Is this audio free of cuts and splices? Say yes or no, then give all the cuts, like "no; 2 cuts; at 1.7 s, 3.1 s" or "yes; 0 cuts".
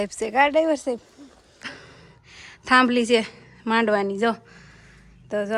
no; 1 cut; at 1.6 s